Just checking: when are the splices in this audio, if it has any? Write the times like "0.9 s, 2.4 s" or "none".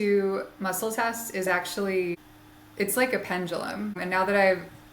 2.3 s, 4.0 s